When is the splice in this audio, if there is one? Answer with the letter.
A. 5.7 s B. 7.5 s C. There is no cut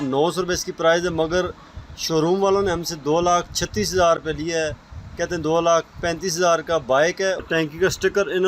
B